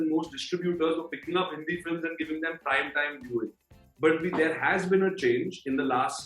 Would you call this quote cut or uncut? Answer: uncut